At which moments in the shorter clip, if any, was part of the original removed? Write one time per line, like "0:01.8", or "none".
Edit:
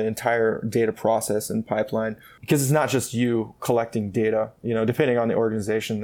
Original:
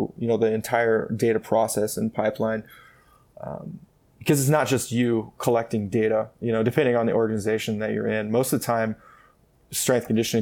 0:02.3